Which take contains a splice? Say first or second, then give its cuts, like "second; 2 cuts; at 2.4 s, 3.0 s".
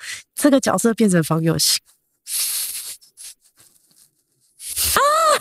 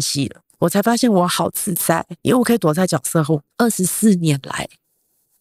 second; 2 cuts; at 2.1 s, 3.5 s